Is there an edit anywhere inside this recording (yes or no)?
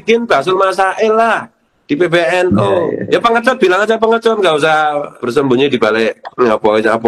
yes